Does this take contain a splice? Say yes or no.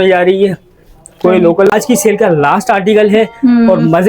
yes